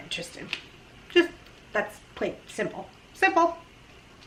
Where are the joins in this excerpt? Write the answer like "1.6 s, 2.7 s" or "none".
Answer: none